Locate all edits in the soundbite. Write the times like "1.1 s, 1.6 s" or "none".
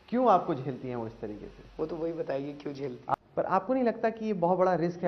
3.1 s